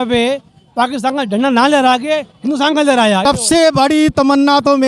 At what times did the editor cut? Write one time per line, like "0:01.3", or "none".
0:03.2